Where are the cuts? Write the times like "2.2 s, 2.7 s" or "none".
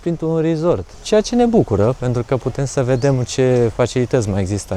0.9 s